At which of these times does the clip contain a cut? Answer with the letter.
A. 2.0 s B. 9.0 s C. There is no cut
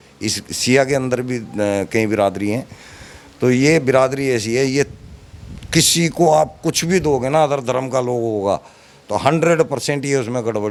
C